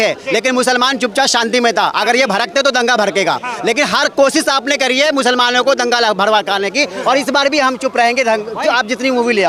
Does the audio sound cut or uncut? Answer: uncut